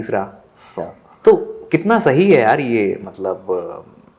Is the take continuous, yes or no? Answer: yes